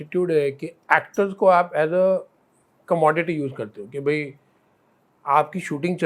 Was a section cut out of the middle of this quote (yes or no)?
no